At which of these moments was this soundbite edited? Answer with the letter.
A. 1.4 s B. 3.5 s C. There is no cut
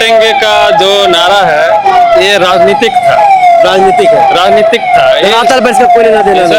C